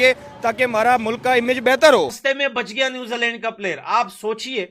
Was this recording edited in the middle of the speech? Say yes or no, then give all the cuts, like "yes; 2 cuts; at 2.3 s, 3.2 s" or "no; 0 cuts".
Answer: yes; 1 cut; at 2.2 s